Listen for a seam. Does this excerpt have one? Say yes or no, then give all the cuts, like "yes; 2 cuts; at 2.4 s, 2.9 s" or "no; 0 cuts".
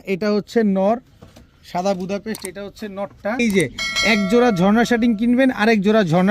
yes; 1 cut; at 3.4 s